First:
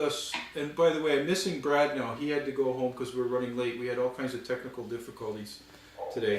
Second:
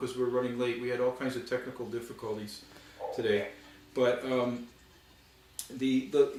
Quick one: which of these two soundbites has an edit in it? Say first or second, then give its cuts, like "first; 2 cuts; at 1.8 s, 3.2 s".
first; 1 cut; at 2.1 s